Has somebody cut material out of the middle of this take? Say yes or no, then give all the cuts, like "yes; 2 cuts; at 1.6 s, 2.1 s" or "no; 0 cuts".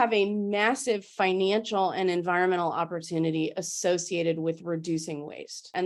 no; 0 cuts